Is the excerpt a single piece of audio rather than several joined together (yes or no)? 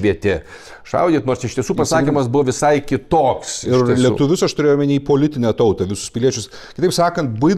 yes